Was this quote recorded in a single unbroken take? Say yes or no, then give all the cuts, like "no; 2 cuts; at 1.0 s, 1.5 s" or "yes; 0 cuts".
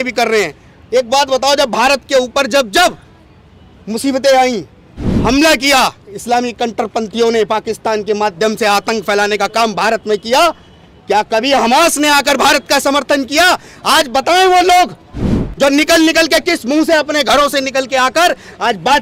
yes; 0 cuts